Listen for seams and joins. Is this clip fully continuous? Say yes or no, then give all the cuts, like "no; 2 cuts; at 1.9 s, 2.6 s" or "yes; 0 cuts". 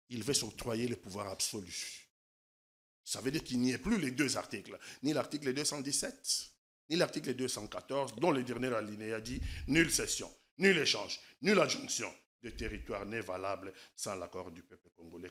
yes; 0 cuts